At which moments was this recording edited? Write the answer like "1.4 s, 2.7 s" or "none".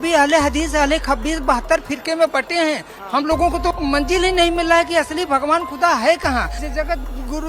3.8 s, 6.6 s